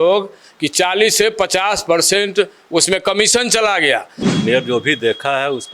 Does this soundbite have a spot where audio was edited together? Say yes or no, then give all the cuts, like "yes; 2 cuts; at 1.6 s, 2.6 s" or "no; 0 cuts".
yes; 1 cut; at 4.2 s